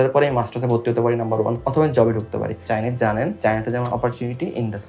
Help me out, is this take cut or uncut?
cut